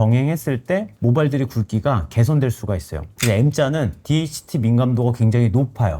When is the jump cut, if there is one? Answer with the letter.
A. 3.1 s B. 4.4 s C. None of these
A